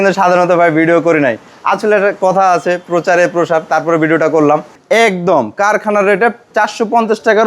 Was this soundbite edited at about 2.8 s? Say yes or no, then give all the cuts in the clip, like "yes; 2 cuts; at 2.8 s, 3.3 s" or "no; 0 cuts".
no; 2 cuts; at 4.8 s, 6.4 s